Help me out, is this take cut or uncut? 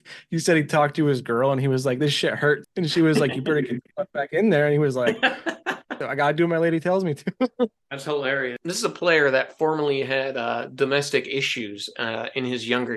cut